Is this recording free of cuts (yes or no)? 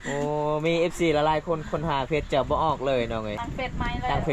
no